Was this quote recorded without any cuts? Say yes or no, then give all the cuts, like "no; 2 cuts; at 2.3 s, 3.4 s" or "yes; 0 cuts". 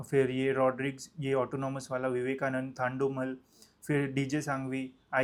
yes; 0 cuts